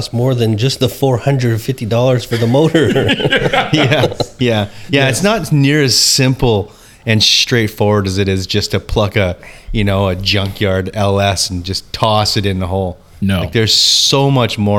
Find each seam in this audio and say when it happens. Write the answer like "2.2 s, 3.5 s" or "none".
none